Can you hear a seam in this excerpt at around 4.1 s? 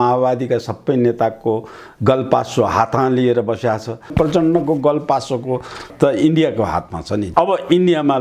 yes; 3 cuts; at 4.1 s, 5.9 s, 7.3 s

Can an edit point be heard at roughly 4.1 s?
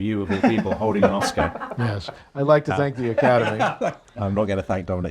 yes; 1 cut; at 4.1 s

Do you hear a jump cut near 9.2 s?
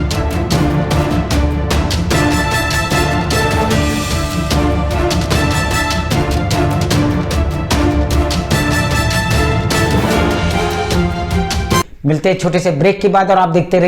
no; 1 cut; at 11.8 s

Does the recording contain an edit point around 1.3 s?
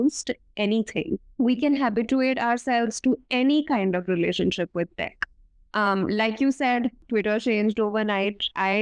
yes; 2 cuts; at 1.3 s, 7.0 s

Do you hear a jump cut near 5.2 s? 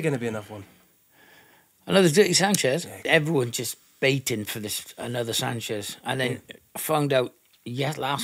no; 1 cut; at 3.0 s

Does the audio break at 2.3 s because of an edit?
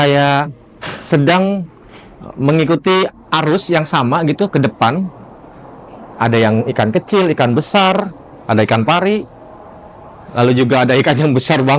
no; 0 cuts

